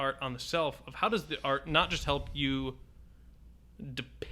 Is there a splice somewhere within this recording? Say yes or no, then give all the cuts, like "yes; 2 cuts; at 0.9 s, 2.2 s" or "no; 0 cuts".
no; 0 cuts